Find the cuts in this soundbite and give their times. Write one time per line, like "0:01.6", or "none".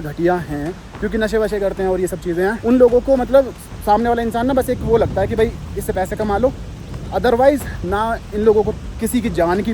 none